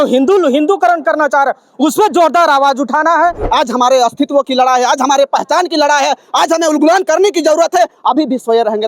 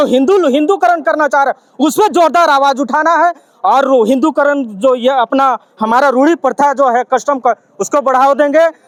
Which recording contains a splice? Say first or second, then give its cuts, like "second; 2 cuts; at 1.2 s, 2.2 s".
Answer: first; 1 cut; at 3.4 s